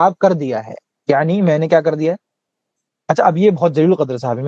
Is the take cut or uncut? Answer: uncut